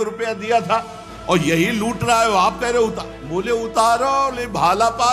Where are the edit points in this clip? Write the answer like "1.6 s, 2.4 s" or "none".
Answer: none